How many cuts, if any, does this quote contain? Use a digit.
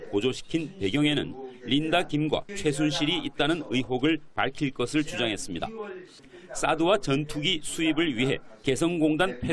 1